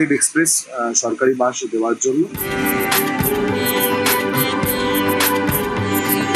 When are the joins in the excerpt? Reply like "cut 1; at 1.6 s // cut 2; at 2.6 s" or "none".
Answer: cut 1; at 2.4 s